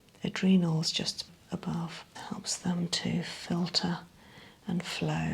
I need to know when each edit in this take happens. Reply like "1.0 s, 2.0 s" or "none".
2.1 s